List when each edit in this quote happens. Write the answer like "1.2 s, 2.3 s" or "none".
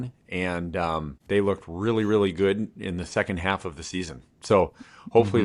1.1 s